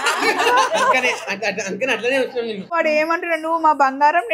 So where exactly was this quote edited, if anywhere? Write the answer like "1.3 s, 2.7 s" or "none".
2.8 s